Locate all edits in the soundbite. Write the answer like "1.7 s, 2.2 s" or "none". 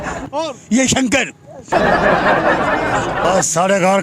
1.7 s, 2.8 s